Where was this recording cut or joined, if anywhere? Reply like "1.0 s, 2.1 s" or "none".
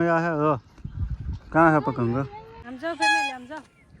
2.7 s